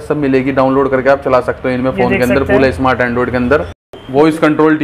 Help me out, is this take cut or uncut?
cut